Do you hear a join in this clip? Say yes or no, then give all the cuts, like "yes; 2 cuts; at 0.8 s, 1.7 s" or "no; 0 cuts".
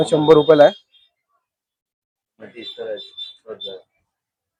no; 0 cuts